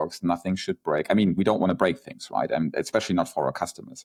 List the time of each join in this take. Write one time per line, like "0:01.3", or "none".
none